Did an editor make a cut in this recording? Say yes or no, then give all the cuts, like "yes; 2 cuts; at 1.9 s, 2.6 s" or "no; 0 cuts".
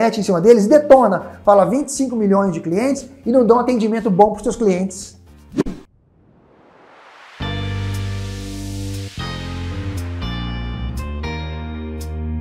yes; 1 cut; at 5.5 s